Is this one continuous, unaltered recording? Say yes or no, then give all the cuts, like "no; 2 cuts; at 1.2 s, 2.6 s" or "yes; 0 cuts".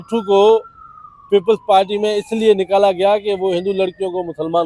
yes; 0 cuts